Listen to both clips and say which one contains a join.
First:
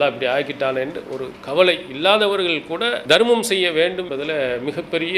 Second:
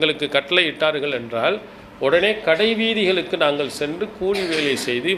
first; 2 cuts; at 2.9 s, 4.1 s

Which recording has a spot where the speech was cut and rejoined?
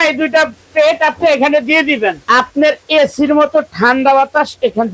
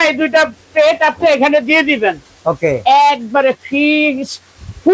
first; 1 cut; at 2.2 s

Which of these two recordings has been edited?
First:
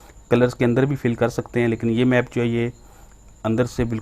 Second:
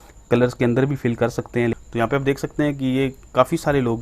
second; 1 cut; at 1.8 s

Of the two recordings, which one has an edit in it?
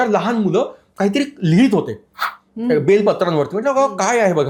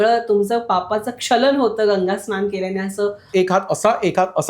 second; 1 cut; at 3.3 s

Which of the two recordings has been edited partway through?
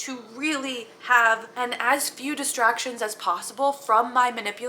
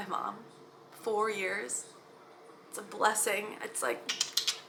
first; 1 cut; at 1.5 s

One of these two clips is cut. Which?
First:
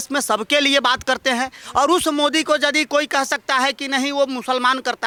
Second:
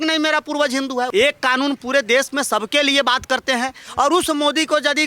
second; 1 cut; at 1.1 s

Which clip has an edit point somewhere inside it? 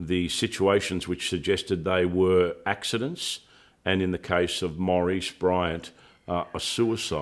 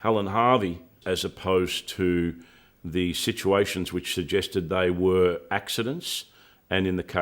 second; 1 cut; at 1.0 s

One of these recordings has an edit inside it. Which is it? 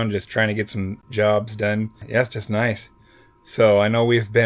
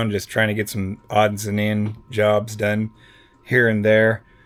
first; 2 cuts; at 1.0 s, 2.0 s

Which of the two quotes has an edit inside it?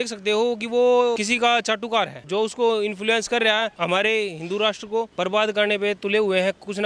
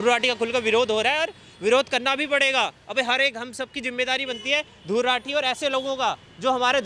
first; 4 cuts; at 1.2 s, 2.2 s, 3.7 s, 5.1 s

